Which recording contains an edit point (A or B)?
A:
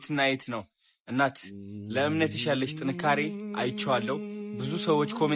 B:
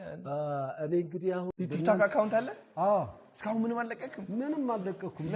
B